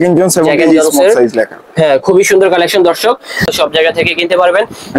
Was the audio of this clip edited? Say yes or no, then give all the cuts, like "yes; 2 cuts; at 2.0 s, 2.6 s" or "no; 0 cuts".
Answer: yes; 1 cut; at 3.4 s